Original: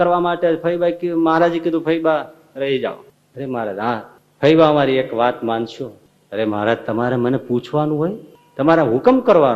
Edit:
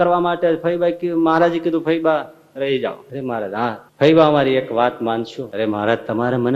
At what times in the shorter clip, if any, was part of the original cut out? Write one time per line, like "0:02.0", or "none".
0:03.5
0:05.4